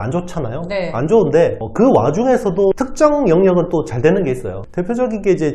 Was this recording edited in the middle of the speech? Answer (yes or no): yes